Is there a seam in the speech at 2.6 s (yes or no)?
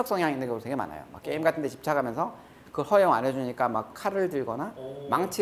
no